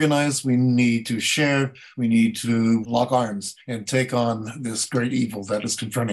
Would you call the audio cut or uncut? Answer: uncut